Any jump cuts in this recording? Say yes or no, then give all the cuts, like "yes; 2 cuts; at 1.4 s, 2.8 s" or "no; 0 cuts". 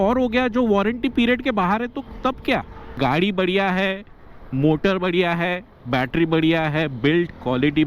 yes; 1 cut; at 2.8 s